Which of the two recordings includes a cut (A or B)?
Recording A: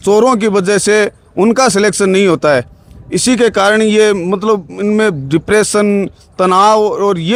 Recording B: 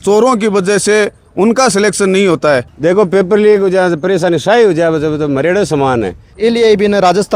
B